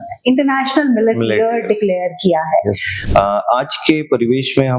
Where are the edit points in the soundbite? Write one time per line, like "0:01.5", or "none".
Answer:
0:02.9